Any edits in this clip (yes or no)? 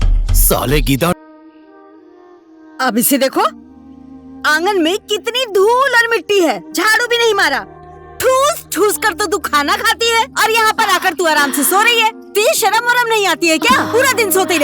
yes